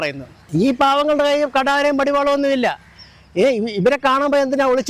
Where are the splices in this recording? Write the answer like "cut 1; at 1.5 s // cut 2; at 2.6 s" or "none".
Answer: none